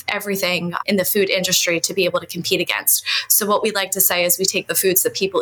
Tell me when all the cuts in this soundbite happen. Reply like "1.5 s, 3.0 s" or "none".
none